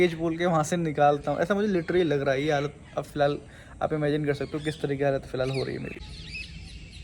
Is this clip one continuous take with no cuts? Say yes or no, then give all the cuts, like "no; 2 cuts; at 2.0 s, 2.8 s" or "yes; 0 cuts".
no; 1 cut; at 6.0 s